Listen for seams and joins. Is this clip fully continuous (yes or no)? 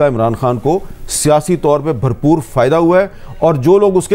yes